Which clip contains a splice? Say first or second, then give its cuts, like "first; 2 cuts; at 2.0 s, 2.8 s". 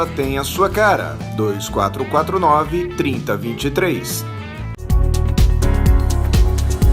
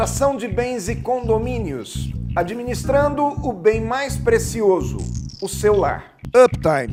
first; 1 cut; at 4.7 s